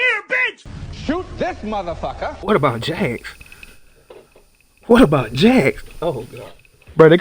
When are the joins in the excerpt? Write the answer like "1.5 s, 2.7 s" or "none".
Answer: 2.3 s